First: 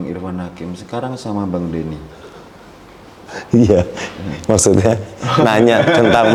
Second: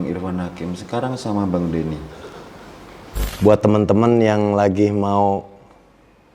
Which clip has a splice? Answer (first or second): second